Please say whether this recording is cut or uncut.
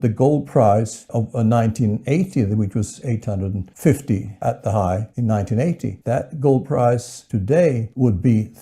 uncut